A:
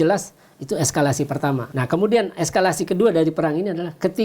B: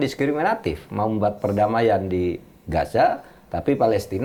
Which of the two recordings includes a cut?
A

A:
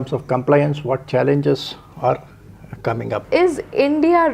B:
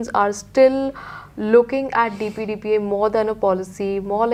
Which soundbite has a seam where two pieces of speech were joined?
A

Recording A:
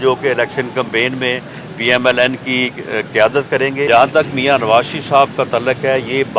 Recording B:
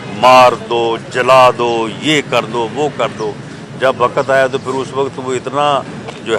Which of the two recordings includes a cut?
A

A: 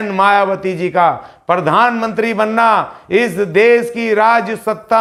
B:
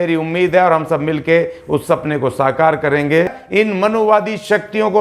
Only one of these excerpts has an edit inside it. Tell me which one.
B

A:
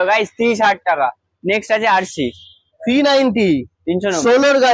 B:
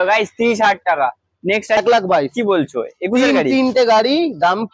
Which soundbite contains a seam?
B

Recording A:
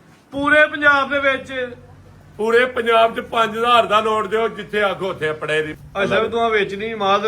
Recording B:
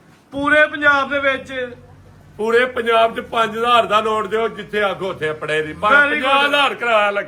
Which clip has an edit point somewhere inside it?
A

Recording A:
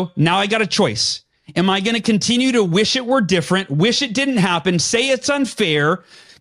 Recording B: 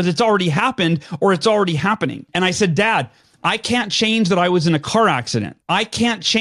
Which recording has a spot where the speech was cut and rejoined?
B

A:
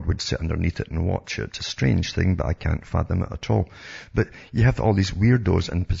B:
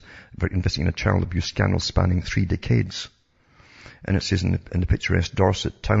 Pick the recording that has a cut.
A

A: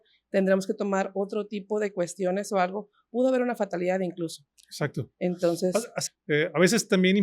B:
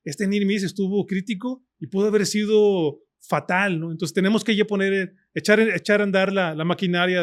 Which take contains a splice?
A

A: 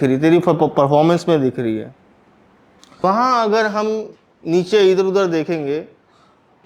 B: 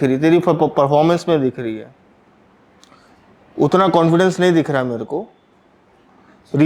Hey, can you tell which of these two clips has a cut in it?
A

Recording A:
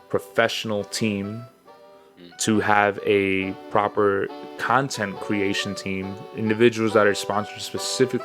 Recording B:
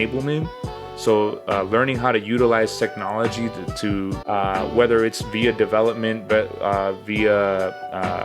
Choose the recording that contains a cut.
B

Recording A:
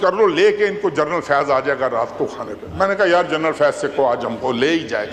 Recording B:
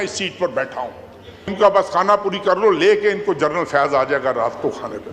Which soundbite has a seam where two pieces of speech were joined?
B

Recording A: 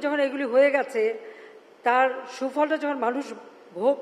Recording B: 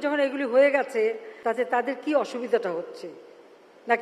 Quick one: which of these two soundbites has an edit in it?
B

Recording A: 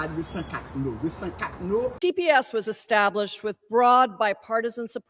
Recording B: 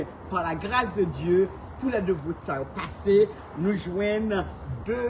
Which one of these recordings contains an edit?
A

